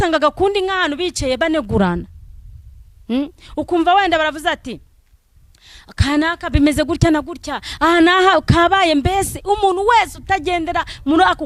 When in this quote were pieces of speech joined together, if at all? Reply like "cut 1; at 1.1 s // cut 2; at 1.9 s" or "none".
none